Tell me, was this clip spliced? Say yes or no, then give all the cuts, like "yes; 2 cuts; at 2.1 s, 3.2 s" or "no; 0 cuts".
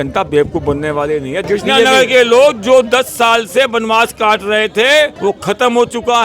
yes; 2 cuts; at 1.4 s, 5.1 s